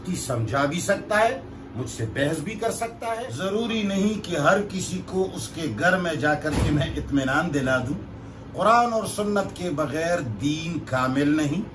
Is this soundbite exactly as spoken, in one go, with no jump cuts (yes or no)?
no